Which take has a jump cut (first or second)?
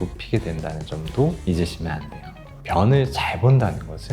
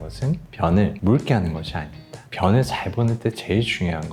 first